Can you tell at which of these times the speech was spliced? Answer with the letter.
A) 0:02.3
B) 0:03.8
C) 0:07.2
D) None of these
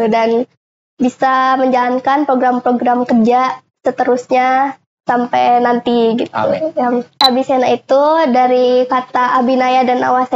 C